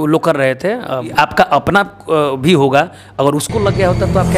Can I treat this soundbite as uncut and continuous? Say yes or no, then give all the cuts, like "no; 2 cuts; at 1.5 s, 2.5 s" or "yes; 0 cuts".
no; 1 cut; at 1.1 s